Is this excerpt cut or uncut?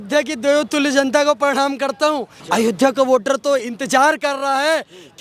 cut